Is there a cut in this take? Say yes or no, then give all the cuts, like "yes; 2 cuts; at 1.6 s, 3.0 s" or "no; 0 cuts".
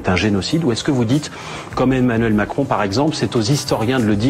no; 0 cuts